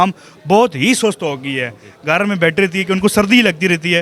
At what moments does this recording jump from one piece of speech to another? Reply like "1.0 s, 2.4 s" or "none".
none

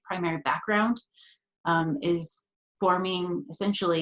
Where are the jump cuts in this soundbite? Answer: none

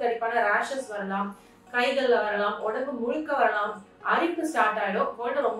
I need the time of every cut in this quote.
none

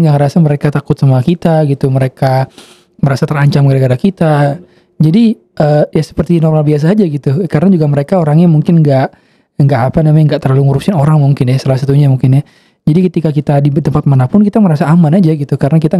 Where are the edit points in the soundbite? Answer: none

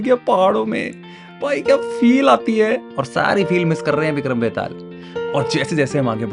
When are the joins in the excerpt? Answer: none

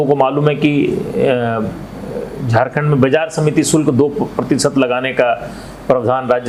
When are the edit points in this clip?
none

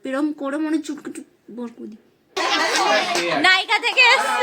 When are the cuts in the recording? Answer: 2.4 s

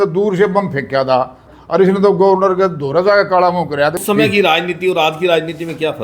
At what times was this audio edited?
1.4 s, 4.0 s

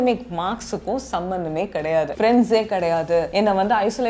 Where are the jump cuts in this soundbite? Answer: 2.1 s

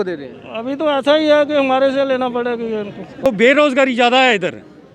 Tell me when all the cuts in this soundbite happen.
3.3 s

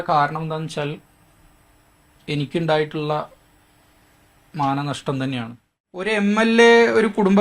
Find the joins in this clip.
6.1 s

